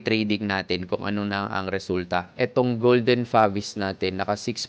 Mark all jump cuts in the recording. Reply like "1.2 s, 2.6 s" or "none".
2.3 s